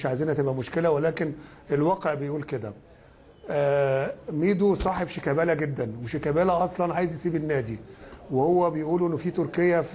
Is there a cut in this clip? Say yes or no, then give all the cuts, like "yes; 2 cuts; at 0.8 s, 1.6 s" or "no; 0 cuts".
no; 0 cuts